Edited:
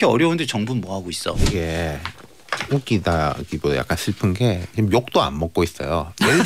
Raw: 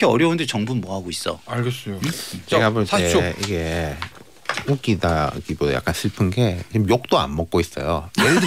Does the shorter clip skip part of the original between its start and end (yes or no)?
yes